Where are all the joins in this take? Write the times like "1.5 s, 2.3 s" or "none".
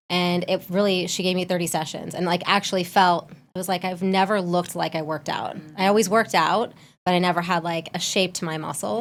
none

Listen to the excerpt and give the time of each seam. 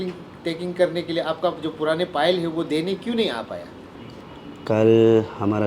none

